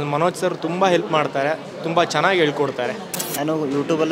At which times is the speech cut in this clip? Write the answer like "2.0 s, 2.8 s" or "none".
3.1 s